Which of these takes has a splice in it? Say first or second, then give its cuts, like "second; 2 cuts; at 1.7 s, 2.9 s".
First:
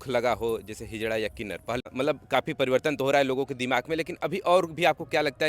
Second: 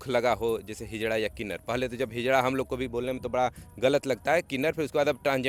first; 1 cut; at 1.9 s